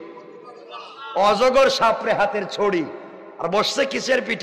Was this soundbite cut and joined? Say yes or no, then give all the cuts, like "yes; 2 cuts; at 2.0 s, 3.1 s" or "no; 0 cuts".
no; 0 cuts